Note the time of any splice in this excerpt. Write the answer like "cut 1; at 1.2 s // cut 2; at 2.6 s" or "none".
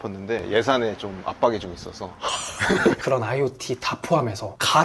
cut 1; at 3.0 s